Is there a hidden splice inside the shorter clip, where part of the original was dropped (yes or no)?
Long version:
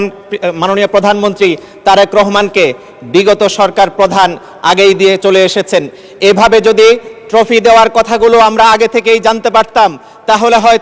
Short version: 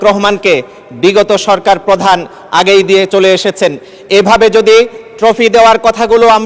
no